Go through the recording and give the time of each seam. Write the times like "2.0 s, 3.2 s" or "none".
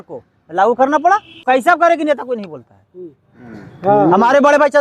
1.4 s